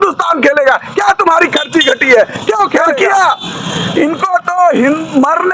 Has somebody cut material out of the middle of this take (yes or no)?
yes